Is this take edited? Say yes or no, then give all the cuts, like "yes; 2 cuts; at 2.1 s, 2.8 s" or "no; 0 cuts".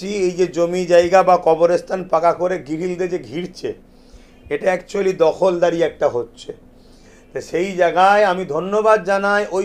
no; 0 cuts